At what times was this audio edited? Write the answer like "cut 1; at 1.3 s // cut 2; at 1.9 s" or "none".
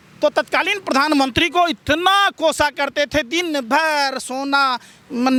none